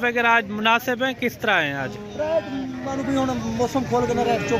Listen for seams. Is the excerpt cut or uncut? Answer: uncut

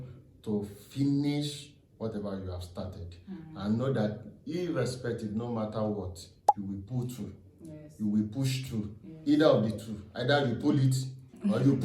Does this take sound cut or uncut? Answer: uncut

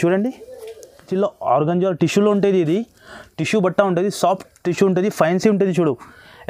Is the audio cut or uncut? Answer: cut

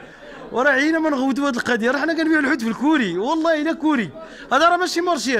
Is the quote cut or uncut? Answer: uncut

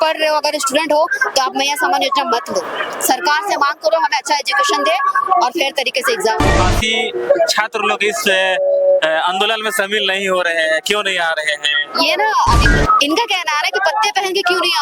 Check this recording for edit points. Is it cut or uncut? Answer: cut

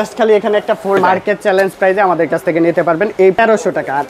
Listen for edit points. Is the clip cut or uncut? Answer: cut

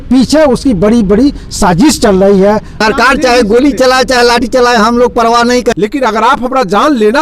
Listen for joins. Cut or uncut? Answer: cut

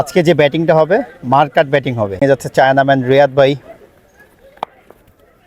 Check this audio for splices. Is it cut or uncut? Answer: cut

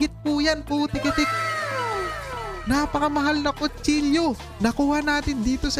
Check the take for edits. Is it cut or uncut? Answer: cut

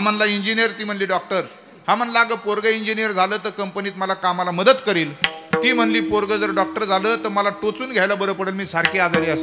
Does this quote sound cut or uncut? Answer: uncut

